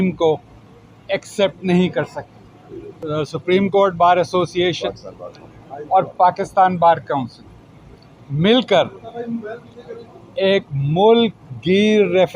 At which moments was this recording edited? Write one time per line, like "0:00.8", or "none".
0:03.0